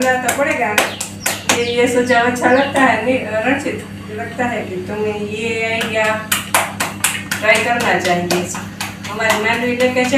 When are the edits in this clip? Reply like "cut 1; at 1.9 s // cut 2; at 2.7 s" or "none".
cut 1; at 1.6 s // cut 2; at 4.2 s

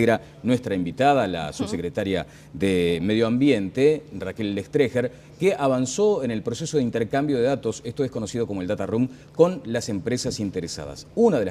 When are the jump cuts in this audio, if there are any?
none

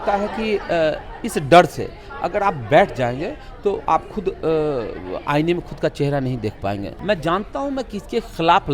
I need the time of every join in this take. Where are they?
cut 1; at 6.9 s

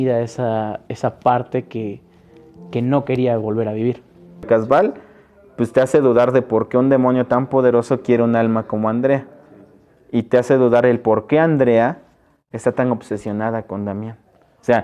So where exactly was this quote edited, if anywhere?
cut 1; at 4.5 s

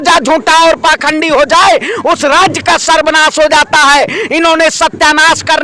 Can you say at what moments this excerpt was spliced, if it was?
none

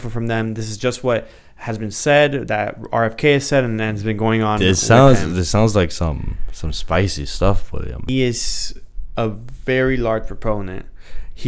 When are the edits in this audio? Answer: cut 1; at 8.0 s

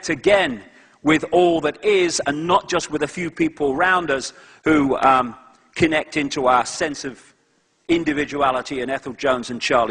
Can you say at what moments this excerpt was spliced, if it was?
none

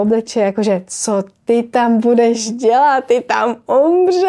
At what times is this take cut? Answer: none

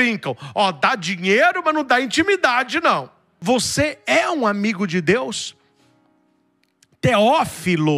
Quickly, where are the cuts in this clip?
cut 1; at 3.3 s

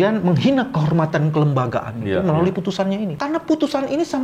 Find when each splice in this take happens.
cut 1; at 3.2 s

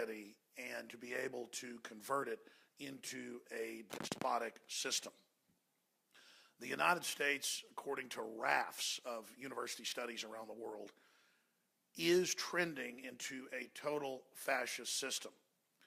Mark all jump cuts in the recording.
cut 1; at 7.9 s

